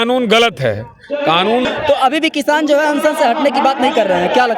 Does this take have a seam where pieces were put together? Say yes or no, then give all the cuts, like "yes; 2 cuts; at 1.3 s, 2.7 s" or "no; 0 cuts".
yes; 1 cut; at 1.7 s